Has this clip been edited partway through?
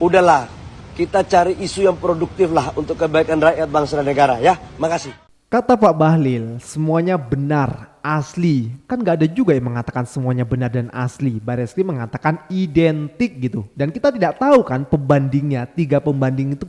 no; 0 cuts

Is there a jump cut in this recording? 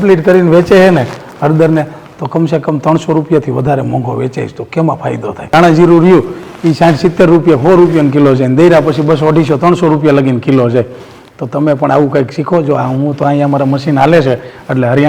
yes; 1 cut; at 5.5 s

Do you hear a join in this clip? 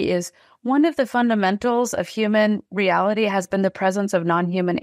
no; 0 cuts

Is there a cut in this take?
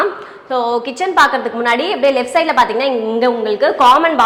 no; 0 cuts

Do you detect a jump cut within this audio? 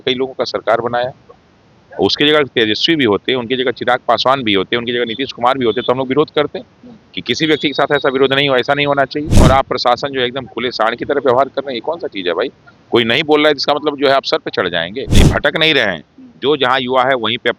yes; 2 cuts; at 9.4 s, 15.3 s

